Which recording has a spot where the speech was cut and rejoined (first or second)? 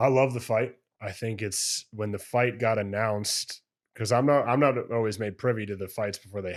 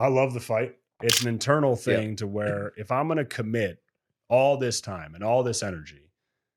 second